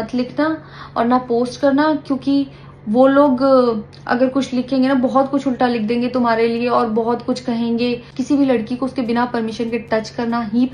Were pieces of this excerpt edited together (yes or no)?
yes